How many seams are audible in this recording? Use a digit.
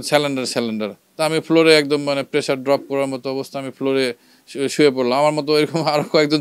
0